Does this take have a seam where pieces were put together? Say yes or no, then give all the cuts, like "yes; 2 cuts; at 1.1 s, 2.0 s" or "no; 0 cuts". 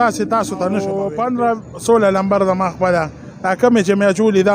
yes; 1 cut; at 1.0 s